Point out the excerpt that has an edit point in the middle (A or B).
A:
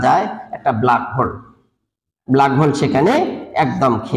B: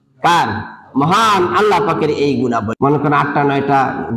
B